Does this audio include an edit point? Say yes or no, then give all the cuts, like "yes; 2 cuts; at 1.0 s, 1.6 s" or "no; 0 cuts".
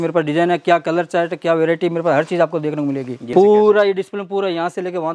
yes; 1 cut; at 3.3 s